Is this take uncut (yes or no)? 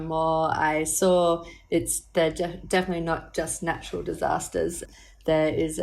no